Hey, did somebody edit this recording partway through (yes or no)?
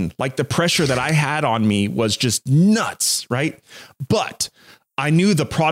no